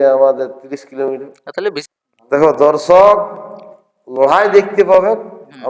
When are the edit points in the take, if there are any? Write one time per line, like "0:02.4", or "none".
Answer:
0:01.8